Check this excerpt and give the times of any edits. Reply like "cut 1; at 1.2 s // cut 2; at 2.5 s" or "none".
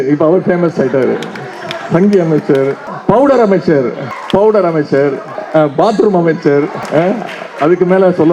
cut 1; at 2.9 s // cut 2; at 4.1 s // cut 3; at 5.3 s // cut 4; at 6.8 s

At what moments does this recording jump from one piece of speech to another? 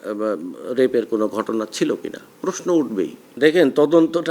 cut 1; at 3.2 s

